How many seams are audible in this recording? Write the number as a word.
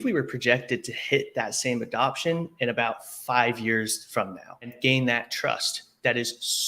one